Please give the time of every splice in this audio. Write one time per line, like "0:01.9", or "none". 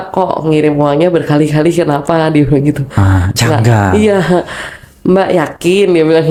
none

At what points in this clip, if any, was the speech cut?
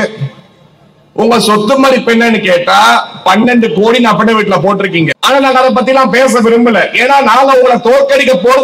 0:05.2

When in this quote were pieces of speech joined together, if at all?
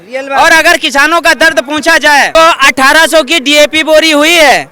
0:02.3

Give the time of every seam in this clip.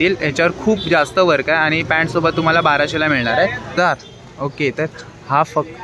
0:03.7

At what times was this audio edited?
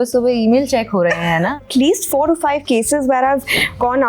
0:01.6

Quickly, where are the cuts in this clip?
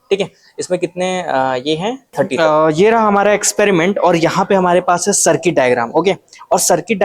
0:02.3

